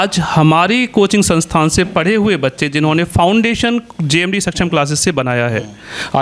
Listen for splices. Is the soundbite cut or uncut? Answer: uncut